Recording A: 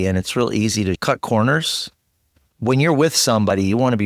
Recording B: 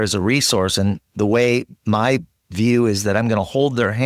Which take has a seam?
A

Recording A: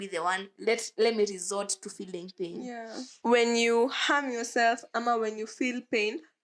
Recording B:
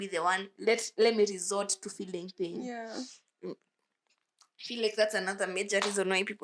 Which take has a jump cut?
A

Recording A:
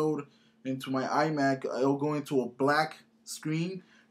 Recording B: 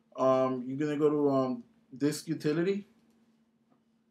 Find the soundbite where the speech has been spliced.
A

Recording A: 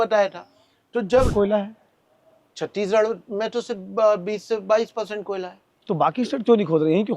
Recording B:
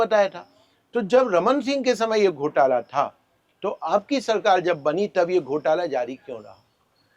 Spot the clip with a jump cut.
A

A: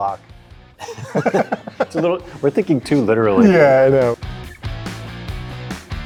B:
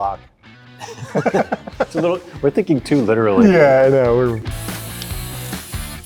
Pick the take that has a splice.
B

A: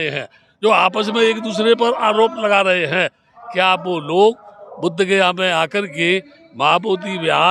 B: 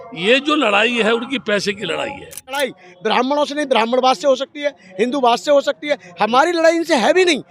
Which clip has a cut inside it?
B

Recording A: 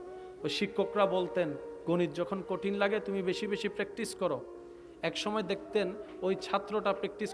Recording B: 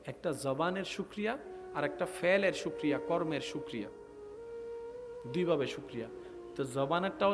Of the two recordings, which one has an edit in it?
B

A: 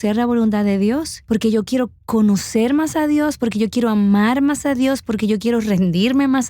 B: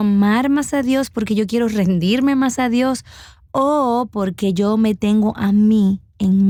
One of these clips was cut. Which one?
A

